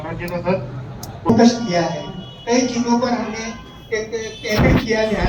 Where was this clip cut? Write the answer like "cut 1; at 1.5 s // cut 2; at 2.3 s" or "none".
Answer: cut 1; at 1.3 s